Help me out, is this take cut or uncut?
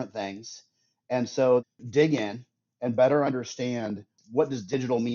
cut